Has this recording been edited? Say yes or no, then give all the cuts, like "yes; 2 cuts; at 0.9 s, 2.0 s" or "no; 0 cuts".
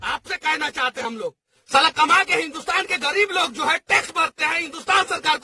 yes; 1 cut; at 1.0 s